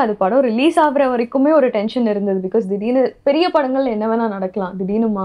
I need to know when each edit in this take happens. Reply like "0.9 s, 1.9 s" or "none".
none